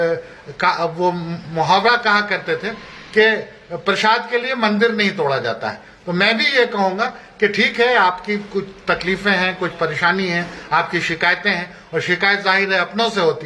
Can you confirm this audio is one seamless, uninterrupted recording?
yes; 0 cuts

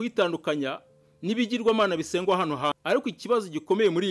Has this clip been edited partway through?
yes; 1 cut; at 2.7 s

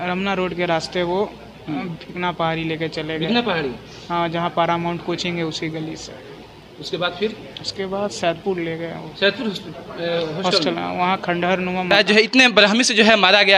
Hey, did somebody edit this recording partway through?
yes; 1 cut; at 11.9 s

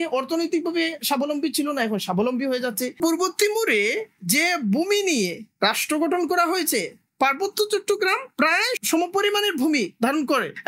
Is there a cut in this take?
yes; 1 cut; at 2.9 s

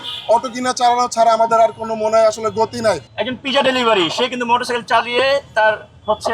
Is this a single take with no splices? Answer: no; 1 cut; at 3.1 s

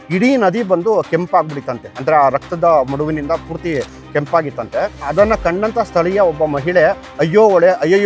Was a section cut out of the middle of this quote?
yes; 1 cut; at 5.1 s

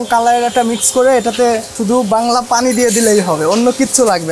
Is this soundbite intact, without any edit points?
yes; 0 cuts

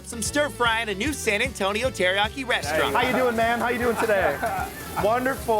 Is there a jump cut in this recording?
yes; 1 cut; at 2.6 s

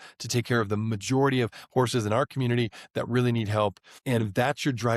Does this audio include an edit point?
no; 0 cuts

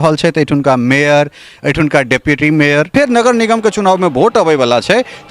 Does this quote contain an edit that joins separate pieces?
yes; 1 cut; at 2.9 s

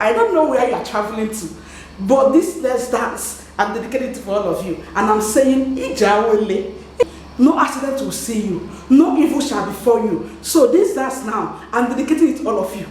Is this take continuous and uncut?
no; 1 cut; at 7.0 s

